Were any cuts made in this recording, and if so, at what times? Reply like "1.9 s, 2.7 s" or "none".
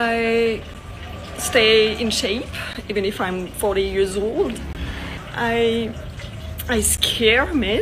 5.1 s